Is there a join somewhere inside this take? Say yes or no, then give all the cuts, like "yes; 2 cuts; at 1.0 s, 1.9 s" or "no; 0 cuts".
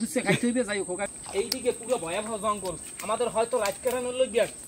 yes; 1 cut; at 1.1 s